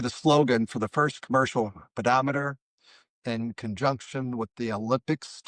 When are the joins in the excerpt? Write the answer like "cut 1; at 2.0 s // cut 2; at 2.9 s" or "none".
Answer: none